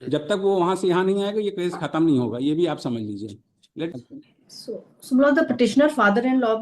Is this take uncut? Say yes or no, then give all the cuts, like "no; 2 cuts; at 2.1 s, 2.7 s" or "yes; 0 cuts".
no; 1 cut; at 3.9 s